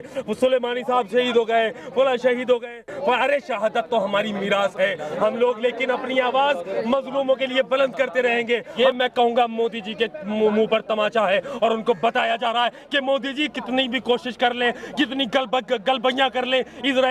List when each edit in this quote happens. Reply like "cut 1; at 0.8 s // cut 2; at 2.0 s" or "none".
cut 1; at 8.7 s

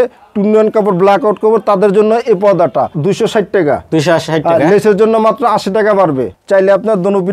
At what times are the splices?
cut 1; at 2.9 s // cut 2; at 6.3 s

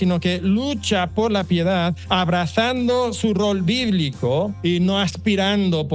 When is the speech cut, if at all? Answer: cut 1; at 2.0 s // cut 2; at 4.5 s

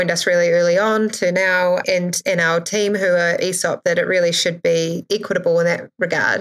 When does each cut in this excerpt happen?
none

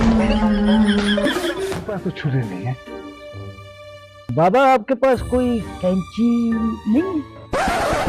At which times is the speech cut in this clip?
cut 1; at 1.9 s

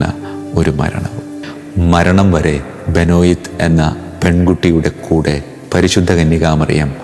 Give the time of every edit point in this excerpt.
cut 1; at 1.4 s

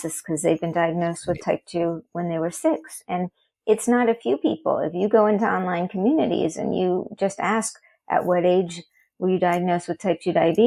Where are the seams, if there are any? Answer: none

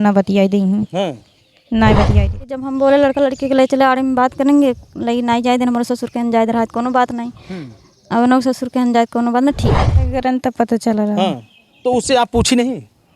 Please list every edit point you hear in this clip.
cut 1; at 2.5 s // cut 2; at 10.2 s

